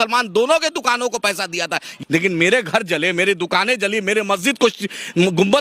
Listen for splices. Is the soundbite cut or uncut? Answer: cut